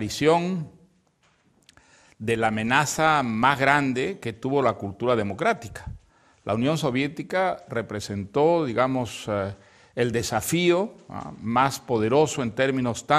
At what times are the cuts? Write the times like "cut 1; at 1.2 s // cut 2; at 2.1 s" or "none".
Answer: none